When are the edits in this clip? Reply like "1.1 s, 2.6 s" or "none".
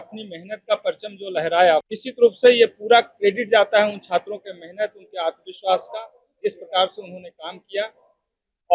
1.9 s